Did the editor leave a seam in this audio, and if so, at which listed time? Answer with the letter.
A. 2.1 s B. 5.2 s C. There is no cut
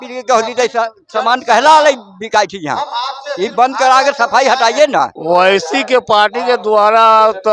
B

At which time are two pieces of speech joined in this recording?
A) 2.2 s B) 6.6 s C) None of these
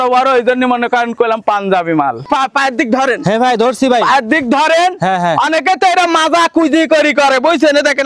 A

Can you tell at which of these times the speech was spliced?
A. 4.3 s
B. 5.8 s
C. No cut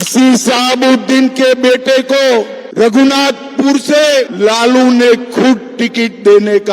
A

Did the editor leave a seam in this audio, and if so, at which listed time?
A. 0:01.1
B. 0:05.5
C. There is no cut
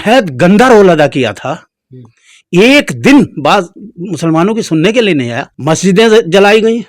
B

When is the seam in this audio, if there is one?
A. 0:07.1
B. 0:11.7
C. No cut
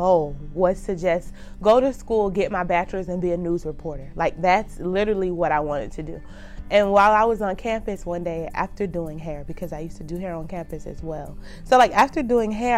C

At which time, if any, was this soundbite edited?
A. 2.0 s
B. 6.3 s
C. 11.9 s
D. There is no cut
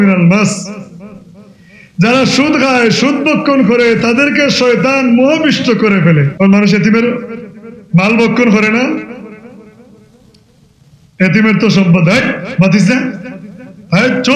B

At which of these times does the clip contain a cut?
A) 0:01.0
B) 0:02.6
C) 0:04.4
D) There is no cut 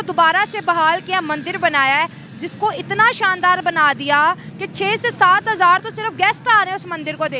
D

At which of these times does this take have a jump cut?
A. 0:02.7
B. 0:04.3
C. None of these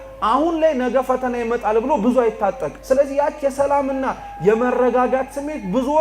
A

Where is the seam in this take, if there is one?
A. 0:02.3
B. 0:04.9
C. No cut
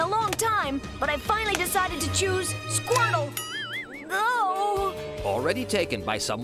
C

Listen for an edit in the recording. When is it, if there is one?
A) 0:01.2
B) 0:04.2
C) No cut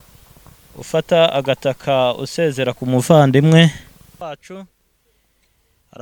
B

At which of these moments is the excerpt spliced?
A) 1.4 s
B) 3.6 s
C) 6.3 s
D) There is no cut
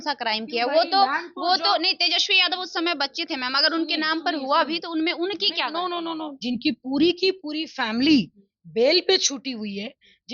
C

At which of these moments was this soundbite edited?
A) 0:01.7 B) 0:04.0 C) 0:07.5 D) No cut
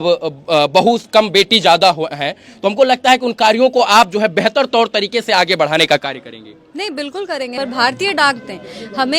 C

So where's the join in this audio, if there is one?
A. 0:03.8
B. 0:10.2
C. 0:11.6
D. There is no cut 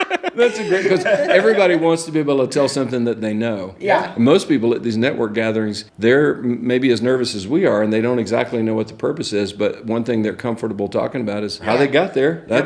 C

